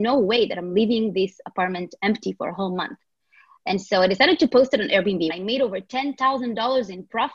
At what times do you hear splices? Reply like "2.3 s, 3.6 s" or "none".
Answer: 5.3 s